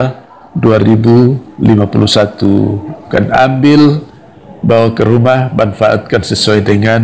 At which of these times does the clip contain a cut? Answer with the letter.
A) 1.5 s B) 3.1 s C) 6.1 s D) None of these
B